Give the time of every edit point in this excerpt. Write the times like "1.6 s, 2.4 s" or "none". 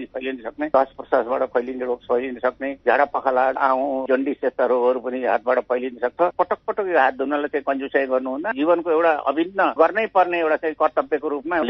3.6 s, 6.2 s, 8.5 s